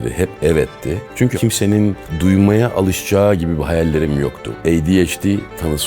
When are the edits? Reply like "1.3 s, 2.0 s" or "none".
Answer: 1.4 s, 4.4 s